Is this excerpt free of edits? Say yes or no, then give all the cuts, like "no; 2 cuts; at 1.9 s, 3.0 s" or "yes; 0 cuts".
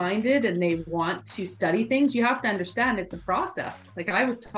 yes; 0 cuts